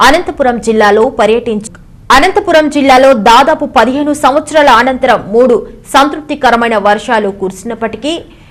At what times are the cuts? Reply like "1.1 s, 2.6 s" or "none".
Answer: none